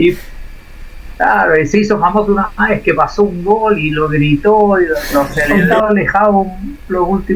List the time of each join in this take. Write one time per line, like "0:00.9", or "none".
0:05.7